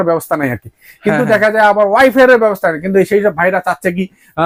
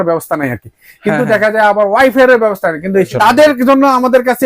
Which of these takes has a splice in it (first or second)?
second